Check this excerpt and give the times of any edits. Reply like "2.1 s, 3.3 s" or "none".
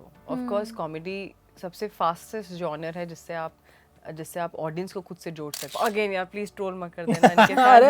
5.7 s